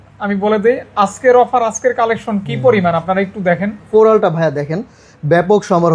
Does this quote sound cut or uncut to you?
cut